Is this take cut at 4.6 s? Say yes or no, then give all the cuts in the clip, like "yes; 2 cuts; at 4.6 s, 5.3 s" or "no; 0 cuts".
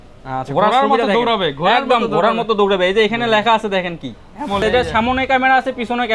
yes; 1 cut; at 4.6 s